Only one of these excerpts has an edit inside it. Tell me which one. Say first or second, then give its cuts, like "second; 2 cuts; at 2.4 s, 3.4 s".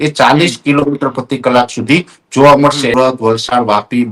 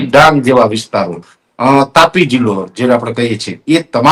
first; 1 cut; at 2.9 s